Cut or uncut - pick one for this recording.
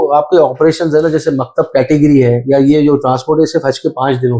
uncut